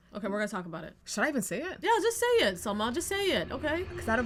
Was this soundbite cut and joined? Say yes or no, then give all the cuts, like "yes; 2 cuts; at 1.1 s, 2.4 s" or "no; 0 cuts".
no; 0 cuts